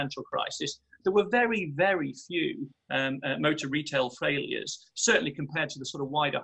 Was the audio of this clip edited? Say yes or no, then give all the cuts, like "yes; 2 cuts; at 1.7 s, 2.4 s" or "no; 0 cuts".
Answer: no; 0 cuts